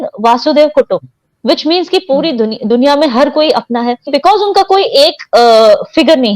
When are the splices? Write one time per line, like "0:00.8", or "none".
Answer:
0:04.1